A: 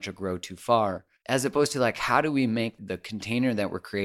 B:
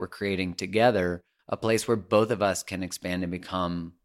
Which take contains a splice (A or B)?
A